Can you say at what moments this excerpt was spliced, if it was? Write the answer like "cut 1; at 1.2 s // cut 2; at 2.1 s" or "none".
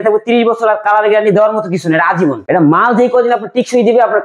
cut 1; at 2.4 s